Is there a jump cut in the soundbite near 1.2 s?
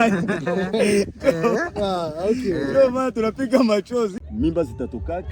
no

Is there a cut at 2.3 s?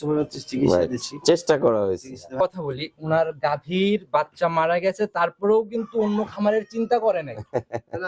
yes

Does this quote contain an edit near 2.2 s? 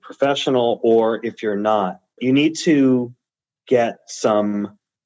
yes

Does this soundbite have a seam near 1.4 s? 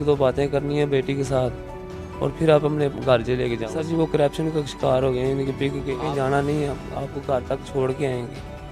no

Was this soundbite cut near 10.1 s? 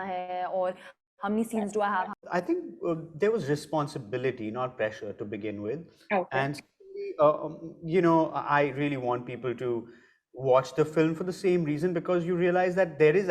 no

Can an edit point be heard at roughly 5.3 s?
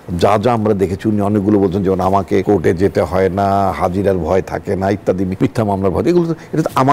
yes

